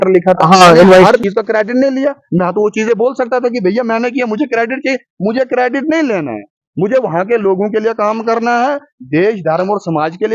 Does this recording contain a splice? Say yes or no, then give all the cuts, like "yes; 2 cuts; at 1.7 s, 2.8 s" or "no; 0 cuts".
yes; 1 cut; at 1.2 s